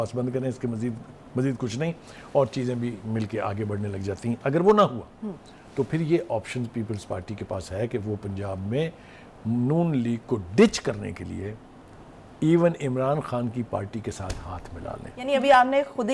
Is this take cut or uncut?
cut